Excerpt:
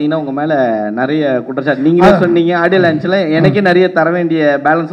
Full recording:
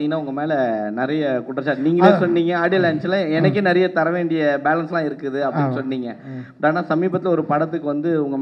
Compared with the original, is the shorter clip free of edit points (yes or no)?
yes